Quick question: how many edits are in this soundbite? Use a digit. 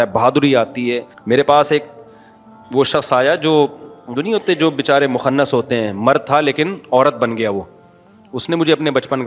1